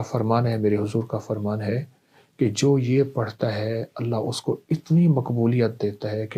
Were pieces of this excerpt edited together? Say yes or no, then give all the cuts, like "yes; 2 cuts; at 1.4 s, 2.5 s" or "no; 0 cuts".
no; 0 cuts